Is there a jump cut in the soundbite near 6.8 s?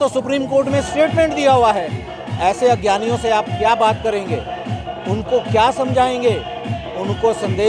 no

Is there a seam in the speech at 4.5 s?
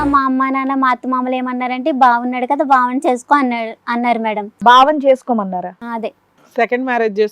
yes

